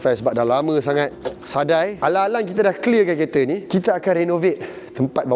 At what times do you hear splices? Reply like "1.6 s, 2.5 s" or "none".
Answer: 2.0 s

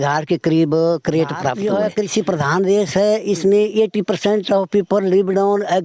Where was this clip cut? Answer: 1.6 s

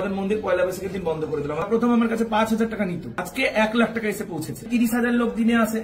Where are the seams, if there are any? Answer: 1.7 s, 3.3 s, 4.7 s

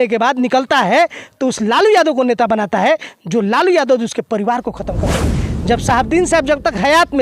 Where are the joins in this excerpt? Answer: 5.3 s

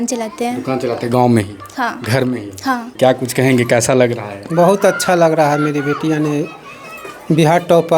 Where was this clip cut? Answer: 2.9 s

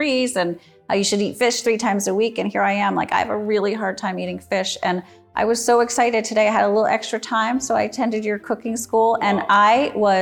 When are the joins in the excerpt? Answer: none

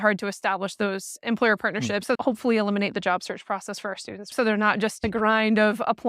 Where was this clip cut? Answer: 2.1 s, 4.3 s

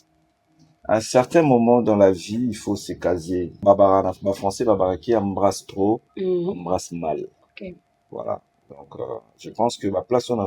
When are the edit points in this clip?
3.6 s

